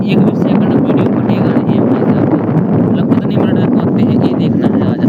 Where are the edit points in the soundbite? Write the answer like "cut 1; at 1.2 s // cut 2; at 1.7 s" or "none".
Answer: none